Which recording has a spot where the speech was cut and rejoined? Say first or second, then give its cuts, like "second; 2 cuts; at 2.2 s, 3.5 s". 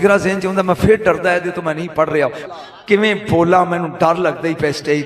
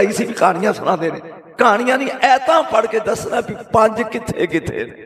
first; 1 cut; at 2.4 s